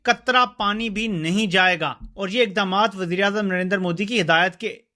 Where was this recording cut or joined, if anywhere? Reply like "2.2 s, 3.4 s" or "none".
2.1 s